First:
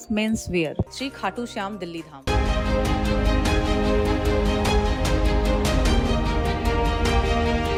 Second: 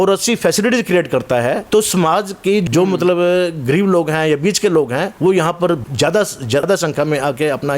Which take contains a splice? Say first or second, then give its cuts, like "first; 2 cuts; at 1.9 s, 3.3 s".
second; 4 cuts; at 1.6 s, 2.6 s, 5.1 s, 6.2 s